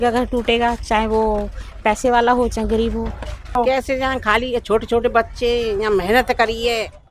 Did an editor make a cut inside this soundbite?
yes; 1 cut; at 3.6 s

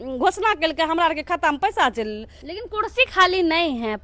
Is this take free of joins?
no; 1 cut; at 2.4 s

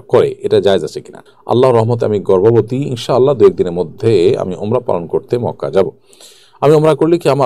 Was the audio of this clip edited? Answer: yes; 1 cut; at 1.3 s

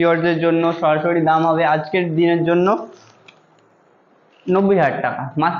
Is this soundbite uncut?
yes; 0 cuts

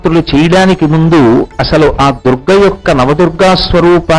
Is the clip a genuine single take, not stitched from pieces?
yes; 0 cuts

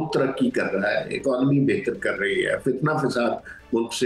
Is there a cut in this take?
no; 0 cuts

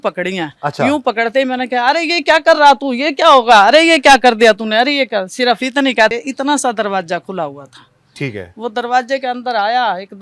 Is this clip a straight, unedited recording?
no; 1 cut; at 6.1 s

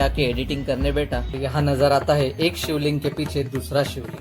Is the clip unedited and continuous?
no; 1 cut; at 1.4 s

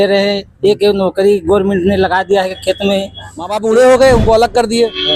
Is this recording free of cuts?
no; 1 cut; at 3.5 s

